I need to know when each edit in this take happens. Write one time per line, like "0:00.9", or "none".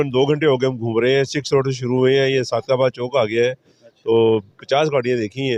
none